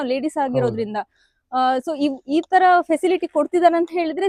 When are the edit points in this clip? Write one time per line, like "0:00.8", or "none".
none